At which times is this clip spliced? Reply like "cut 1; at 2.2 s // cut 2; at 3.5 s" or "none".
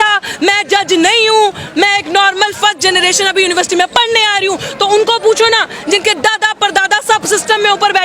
none